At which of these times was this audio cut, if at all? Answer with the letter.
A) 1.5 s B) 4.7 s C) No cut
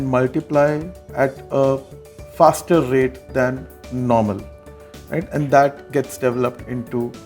C